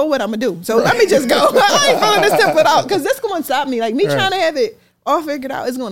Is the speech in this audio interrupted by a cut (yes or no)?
no